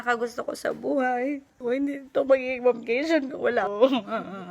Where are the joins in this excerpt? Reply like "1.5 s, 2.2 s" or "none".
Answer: 1.6 s, 3.7 s